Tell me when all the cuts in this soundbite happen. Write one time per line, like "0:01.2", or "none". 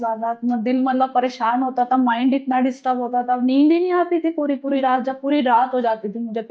none